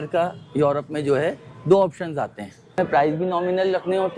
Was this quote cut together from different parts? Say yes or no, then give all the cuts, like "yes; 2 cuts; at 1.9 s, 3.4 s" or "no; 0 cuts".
yes; 1 cut; at 2.8 s